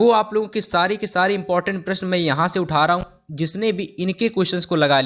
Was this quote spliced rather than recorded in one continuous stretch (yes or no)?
yes